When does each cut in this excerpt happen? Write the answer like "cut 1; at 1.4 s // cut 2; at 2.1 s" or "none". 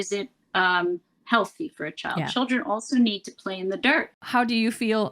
cut 1; at 4.2 s